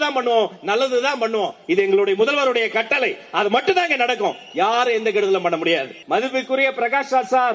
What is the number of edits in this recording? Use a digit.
1